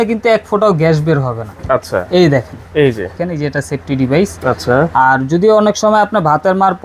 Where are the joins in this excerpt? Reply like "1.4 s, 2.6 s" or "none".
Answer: 3.3 s